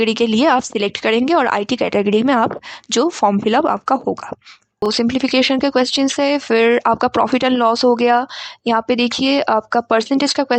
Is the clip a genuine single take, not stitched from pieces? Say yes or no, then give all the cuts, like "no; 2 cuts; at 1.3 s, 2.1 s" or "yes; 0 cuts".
no; 1 cut; at 4.8 s